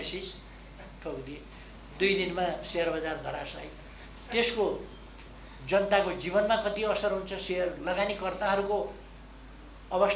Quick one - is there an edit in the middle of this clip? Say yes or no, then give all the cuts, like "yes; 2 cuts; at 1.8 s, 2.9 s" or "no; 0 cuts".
no; 0 cuts